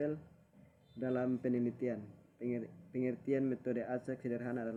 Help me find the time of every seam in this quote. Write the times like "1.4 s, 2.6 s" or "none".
none

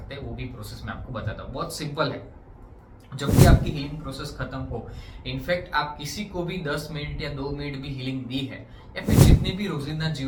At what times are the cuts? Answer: none

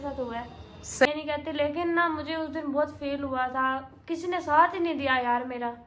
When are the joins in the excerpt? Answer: 1.1 s

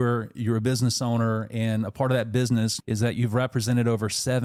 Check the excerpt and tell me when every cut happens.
none

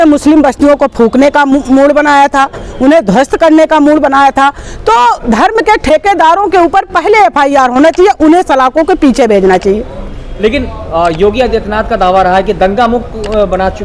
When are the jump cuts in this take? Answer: none

